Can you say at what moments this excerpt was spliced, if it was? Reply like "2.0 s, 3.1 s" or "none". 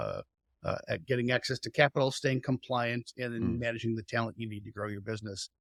none